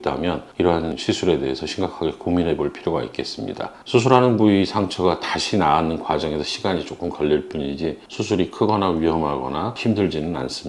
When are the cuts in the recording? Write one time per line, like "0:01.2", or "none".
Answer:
0:01.0
0:09.8